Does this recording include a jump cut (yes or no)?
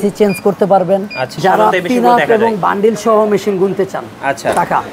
yes